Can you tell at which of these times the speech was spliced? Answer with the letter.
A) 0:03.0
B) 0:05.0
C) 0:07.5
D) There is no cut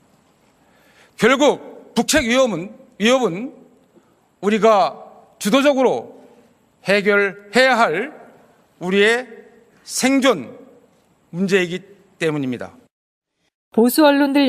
D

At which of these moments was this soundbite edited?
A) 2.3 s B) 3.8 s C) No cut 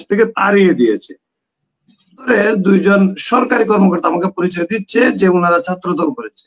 A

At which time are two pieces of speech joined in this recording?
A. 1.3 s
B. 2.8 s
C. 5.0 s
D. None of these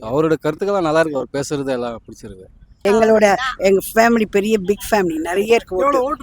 B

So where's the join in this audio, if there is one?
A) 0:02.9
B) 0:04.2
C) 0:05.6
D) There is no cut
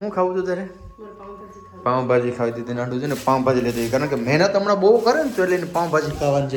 D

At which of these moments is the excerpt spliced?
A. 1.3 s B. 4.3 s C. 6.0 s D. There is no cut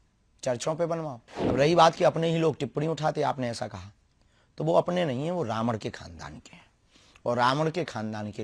A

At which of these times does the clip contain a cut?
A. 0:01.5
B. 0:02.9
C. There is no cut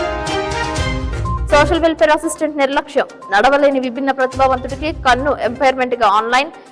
C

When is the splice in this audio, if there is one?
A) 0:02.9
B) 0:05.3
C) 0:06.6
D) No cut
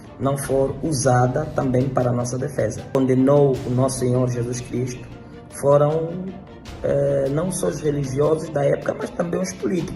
A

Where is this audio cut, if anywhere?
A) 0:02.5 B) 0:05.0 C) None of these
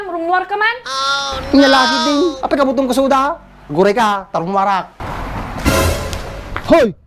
B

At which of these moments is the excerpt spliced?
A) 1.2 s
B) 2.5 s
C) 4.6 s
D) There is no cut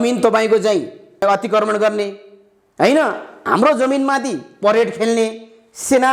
A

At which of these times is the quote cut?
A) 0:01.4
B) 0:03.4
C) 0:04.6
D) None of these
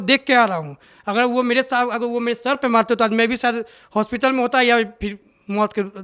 D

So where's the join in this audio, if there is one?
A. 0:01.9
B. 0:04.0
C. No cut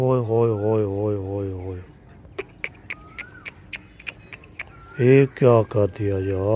B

